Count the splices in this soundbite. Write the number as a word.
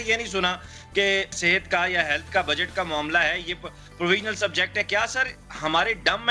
one